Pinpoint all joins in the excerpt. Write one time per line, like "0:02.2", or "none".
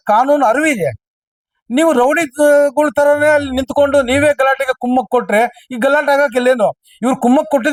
none